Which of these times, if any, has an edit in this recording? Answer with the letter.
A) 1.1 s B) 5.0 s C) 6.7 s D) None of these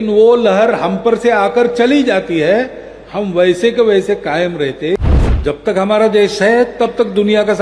B